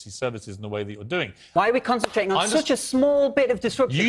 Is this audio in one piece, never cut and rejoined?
no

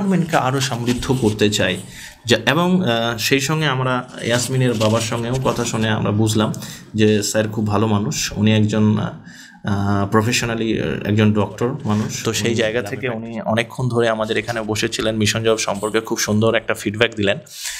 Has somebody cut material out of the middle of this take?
yes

